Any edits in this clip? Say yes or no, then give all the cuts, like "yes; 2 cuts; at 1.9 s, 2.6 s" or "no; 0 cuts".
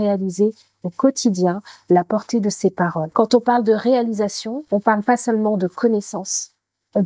yes; 2 cuts; at 3.0 s, 4.5 s